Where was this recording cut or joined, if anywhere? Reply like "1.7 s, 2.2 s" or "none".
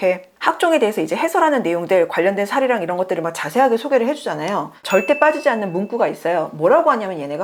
none